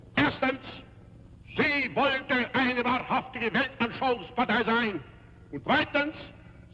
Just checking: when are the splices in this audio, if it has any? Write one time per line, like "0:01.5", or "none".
none